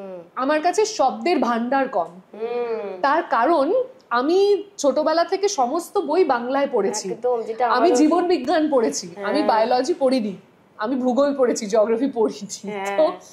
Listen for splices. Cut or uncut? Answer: uncut